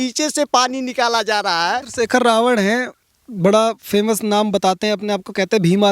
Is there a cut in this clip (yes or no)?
yes